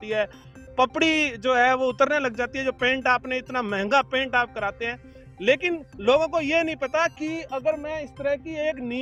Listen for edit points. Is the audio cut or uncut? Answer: uncut